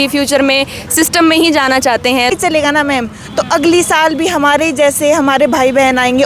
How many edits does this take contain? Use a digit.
1